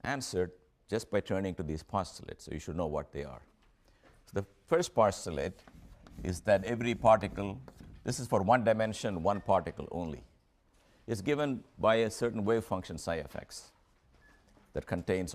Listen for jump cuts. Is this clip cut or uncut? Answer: cut